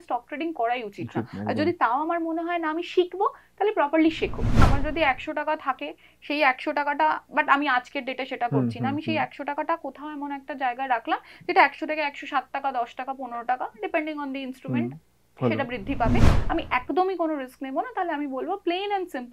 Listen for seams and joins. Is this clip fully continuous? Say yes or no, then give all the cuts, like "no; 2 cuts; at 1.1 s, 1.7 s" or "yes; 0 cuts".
no; 2 cuts; at 4.7 s, 16.4 s